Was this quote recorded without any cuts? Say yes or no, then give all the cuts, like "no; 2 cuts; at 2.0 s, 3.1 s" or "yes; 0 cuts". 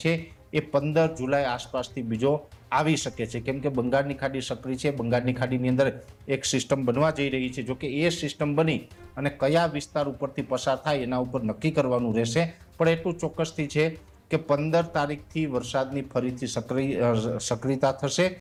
yes; 0 cuts